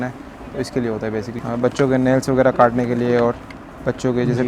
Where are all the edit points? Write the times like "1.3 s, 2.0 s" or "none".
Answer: 1.3 s